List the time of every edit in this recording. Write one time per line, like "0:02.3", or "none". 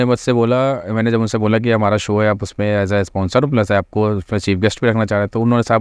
none